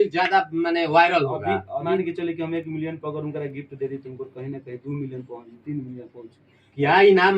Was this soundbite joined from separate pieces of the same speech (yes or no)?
yes